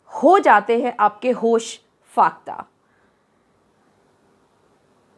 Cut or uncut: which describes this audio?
uncut